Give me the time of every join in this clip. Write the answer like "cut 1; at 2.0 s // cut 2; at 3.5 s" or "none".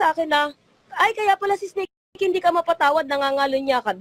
none